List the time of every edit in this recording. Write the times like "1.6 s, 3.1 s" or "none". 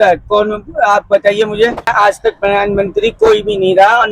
1.9 s